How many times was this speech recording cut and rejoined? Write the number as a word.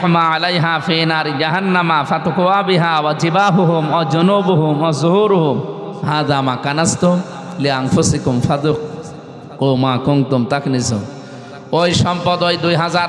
zero